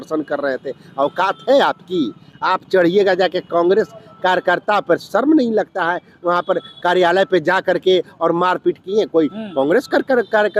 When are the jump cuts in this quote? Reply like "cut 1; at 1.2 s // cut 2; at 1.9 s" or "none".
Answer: none